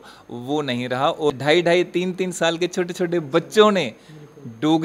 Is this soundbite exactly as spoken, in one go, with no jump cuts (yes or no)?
no